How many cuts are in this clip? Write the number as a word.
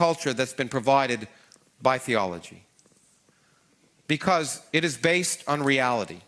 one